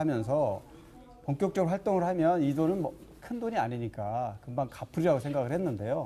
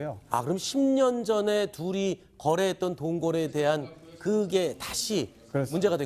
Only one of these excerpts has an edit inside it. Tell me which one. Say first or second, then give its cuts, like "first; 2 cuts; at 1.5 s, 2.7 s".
second; 1 cut; at 1.4 s